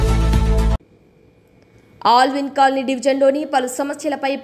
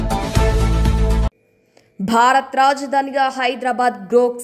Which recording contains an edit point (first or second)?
second